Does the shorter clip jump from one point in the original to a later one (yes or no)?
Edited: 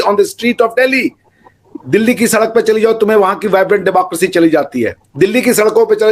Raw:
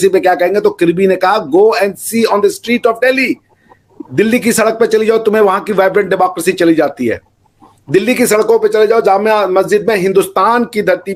yes